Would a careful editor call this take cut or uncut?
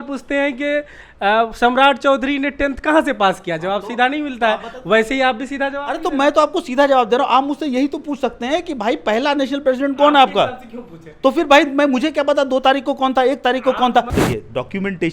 cut